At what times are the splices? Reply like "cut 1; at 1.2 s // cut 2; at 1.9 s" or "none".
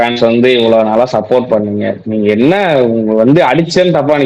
none